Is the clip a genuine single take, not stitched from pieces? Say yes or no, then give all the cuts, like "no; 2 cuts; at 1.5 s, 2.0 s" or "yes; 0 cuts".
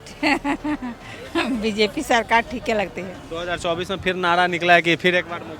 yes; 0 cuts